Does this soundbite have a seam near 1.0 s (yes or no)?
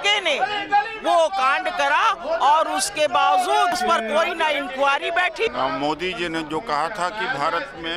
no